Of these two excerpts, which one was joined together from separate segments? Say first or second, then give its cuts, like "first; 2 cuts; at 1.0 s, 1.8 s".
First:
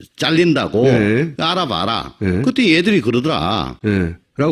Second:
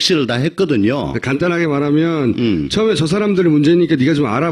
second; 1 cut; at 2.4 s